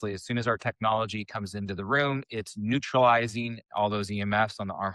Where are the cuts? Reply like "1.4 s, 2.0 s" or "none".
none